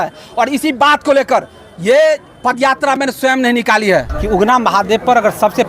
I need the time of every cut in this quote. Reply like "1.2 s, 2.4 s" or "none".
4.2 s